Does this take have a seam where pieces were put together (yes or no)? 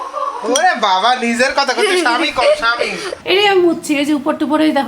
yes